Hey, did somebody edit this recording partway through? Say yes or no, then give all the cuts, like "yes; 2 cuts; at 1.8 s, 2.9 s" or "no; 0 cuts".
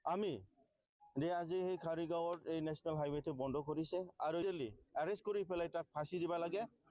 yes; 1 cut; at 4.4 s